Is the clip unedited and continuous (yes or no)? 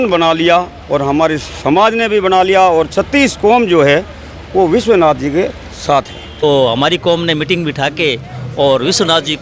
no